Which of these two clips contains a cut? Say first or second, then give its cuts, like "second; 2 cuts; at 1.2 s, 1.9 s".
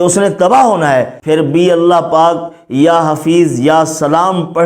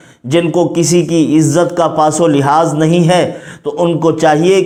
first; 1 cut; at 1.1 s